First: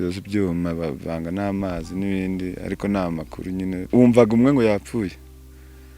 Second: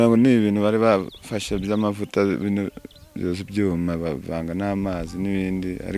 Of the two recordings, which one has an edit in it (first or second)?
first